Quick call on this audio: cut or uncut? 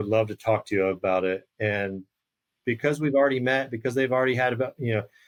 uncut